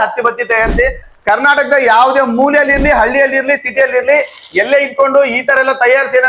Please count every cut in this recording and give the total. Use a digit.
1